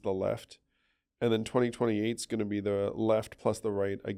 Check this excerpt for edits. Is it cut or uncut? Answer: uncut